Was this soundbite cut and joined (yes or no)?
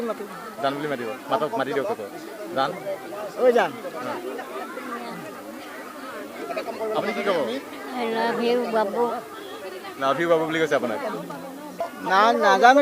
yes